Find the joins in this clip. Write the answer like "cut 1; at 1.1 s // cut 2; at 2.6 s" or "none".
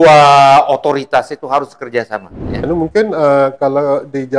cut 1; at 2.6 s